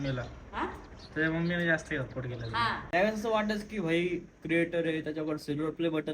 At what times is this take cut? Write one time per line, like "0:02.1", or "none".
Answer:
0:02.8